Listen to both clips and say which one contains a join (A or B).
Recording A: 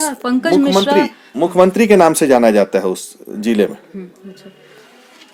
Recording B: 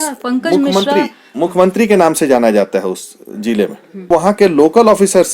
B